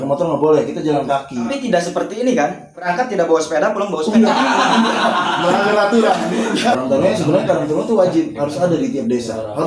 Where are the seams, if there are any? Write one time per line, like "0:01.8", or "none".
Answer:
0:01.5
0:02.9
0:06.7